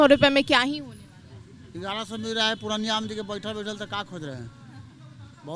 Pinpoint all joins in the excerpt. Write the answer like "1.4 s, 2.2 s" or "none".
none